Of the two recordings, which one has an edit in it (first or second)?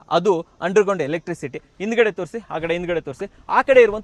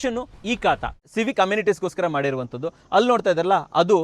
second